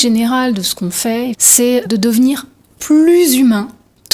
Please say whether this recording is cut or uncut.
cut